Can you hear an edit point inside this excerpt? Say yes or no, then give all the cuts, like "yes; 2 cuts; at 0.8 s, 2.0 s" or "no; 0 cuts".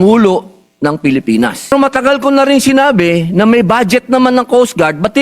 yes; 1 cut; at 1.7 s